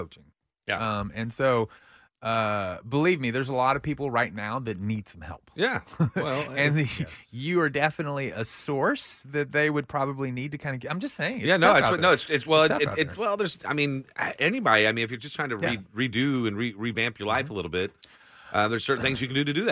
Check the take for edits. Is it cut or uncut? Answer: uncut